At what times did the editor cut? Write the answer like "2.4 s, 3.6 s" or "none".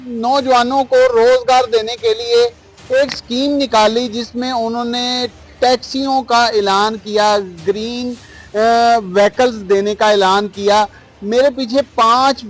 none